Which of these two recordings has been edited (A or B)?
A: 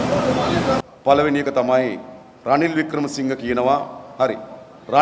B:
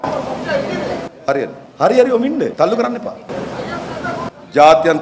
B